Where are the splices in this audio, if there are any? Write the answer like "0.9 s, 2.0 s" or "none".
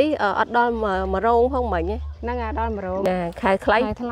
3.1 s